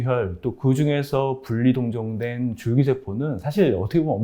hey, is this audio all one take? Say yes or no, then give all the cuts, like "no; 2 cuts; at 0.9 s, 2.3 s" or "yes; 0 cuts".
yes; 0 cuts